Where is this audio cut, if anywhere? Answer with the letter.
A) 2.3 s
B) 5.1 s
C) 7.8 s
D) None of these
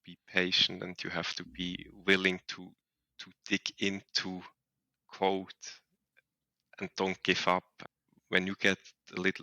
C